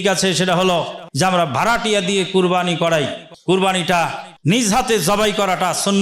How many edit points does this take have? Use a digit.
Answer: 3